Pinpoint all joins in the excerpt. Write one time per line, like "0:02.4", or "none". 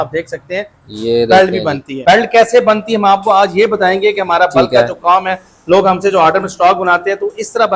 0:01.9